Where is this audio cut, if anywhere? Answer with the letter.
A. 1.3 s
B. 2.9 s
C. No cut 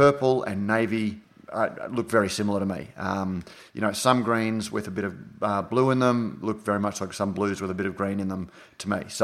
A